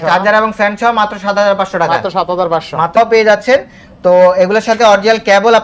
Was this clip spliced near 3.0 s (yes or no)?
yes